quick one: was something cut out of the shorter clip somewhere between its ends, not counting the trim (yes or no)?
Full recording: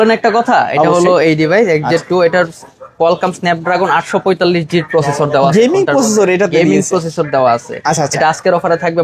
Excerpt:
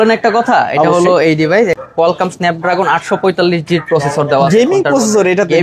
yes